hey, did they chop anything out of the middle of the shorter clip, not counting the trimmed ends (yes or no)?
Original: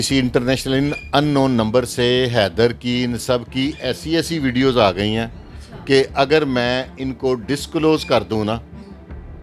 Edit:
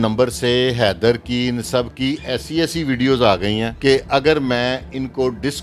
yes